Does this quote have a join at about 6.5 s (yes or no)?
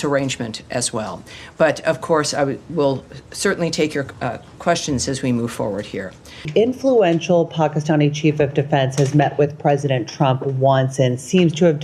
yes